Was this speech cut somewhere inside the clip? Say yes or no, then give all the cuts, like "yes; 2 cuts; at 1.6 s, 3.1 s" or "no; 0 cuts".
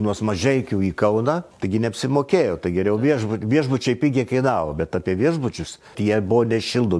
yes; 2 cuts; at 1.5 s, 5.9 s